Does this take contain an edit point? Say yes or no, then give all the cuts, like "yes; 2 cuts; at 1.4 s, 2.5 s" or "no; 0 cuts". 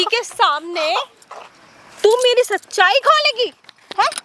no; 0 cuts